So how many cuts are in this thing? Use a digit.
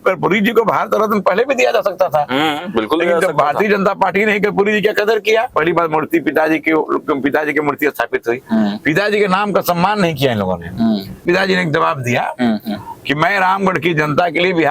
2